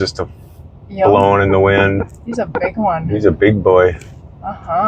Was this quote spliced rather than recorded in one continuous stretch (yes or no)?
no